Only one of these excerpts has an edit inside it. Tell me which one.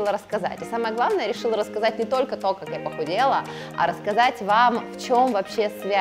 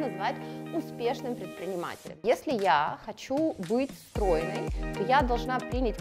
second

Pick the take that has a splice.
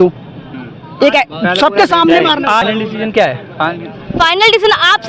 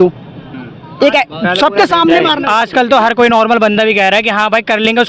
first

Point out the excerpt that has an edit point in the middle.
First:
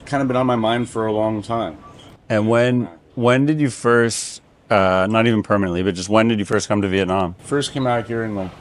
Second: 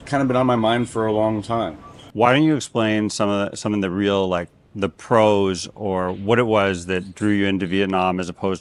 second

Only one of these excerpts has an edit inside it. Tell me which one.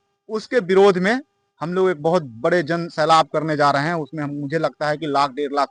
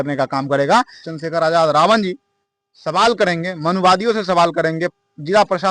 second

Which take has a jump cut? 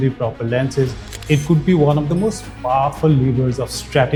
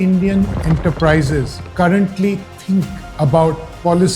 second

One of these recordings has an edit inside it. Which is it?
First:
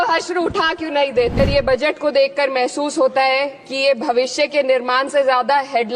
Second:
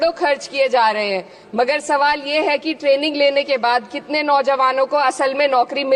first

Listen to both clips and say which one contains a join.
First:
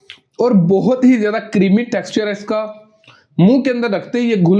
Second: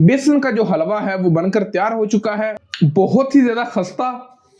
second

